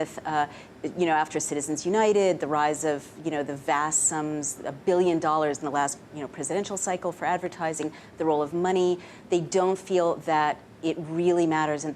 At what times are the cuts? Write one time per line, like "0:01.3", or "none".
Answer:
0:05.6